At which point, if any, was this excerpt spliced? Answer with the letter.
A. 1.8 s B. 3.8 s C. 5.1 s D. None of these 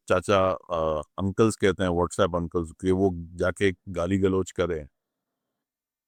D